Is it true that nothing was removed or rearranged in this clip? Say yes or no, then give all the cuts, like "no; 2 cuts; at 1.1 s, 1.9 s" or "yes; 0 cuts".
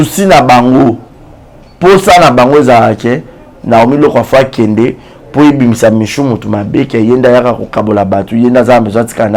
yes; 0 cuts